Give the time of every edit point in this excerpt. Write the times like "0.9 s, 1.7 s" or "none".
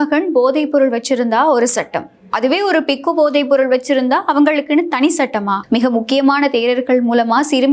5.6 s

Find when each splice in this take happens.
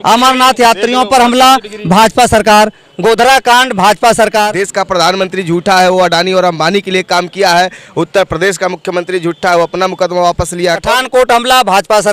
4.5 s, 10.8 s

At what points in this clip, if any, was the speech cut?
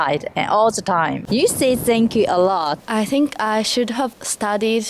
1.2 s, 2.8 s

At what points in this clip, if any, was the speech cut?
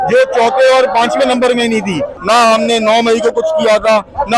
2.1 s

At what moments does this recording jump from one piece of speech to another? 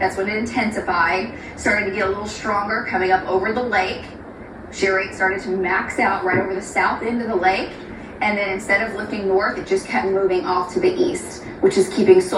none

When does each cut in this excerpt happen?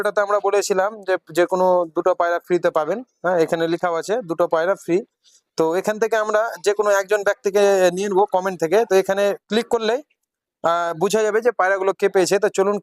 none

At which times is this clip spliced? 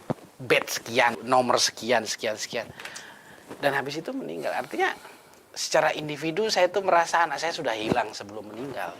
1.2 s

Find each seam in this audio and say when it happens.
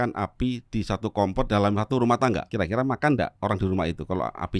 2.5 s, 3.3 s

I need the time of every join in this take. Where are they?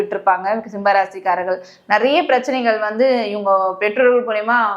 none

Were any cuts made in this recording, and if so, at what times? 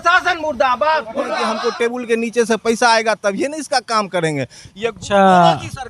1.4 s

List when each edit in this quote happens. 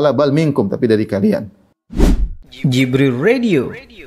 1.8 s

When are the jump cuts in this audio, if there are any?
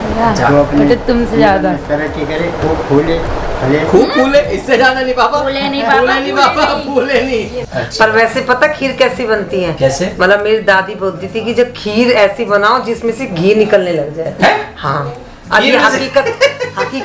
7.6 s

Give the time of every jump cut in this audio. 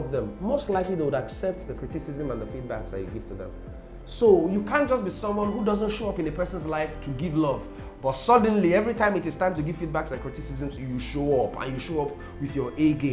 none

